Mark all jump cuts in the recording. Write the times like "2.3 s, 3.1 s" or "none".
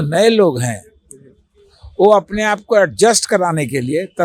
none